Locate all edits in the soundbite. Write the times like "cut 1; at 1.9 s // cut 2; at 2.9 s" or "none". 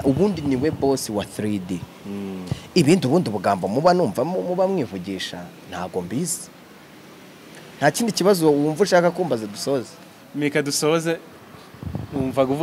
none